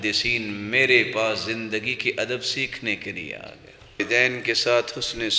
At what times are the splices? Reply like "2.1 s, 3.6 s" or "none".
4.0 s

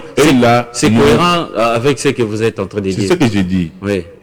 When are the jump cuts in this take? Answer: none

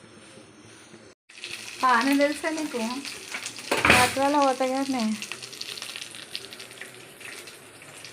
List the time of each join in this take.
1.3 s

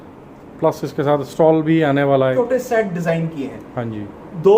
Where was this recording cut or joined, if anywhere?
2.3 s

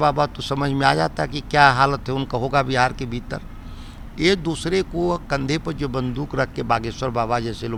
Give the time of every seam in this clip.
none

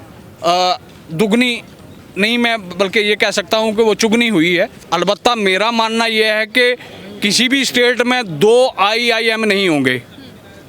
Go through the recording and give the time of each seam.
4.8 s

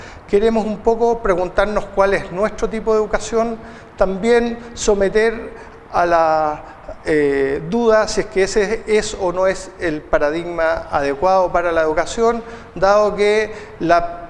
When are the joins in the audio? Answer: 3.9 s

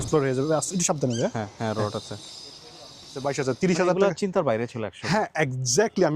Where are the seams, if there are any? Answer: 3.2 s

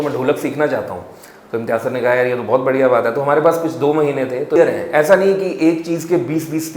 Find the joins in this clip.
4.6 s

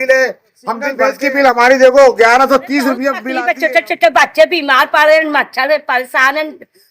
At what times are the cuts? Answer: 1.0 s, 3.3 s

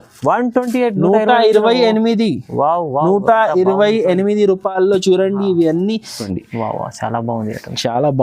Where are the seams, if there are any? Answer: 6.3 s

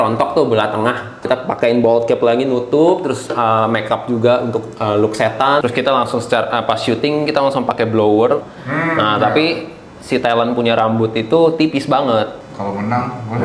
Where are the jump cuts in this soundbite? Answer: 1.2 s, 5.6 s, 8.5 s, 12.4 s

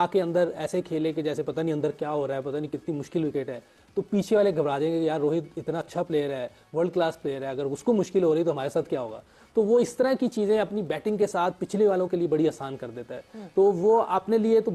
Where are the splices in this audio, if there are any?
none

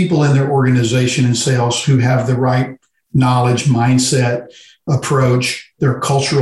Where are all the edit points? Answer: 4.9 s

